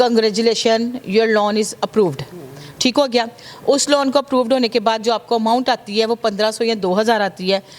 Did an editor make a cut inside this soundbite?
no; 0 cuts

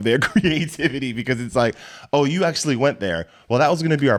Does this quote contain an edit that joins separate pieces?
no; 0 cuts

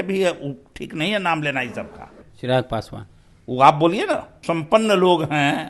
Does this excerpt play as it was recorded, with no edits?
no; 2 cuts; at 2.2 s, 4.3 s

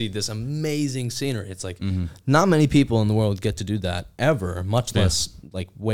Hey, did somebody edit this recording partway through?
no; 0 cuts

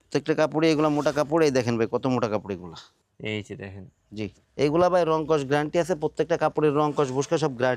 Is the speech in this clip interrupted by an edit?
no; 0 cuts

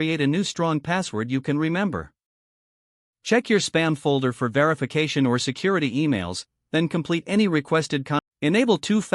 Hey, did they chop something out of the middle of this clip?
yes; 1 cut; at 8.2 s

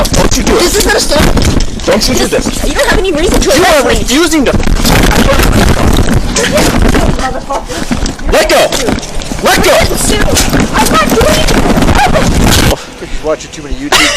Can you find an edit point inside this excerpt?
yes; 1 cut; at 12.7 s

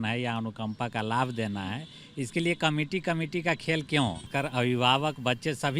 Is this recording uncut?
no; 1 cut; at 4.3 s

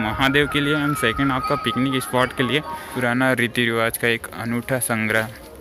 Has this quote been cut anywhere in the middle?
yes; 1 cut; at 2.8 s

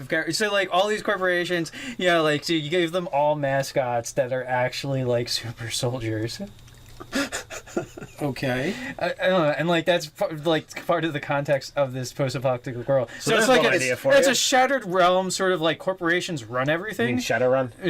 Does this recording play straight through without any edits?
no; 1 cut; at 1.8 s

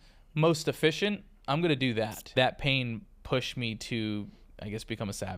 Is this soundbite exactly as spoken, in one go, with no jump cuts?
no; 1 cut; at 2.2 s

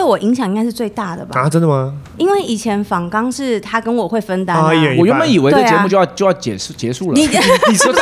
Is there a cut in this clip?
no; 0 cuts

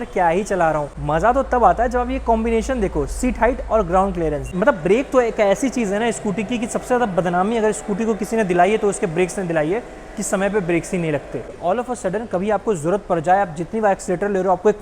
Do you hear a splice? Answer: yes; 3 cuts; at 1.0 s, 4.4 s, 11.5 s

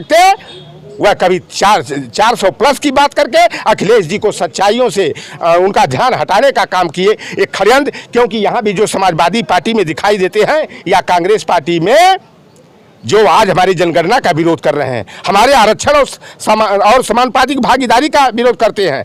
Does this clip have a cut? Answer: no; 0 cuts

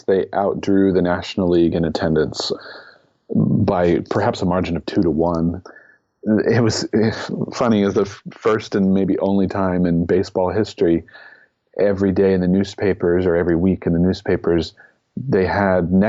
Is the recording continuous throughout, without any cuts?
no; 2 cuts; at 2.5 s, 5.7 s

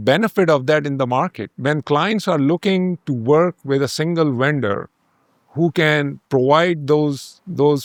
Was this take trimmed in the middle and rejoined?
no; 0 cuts

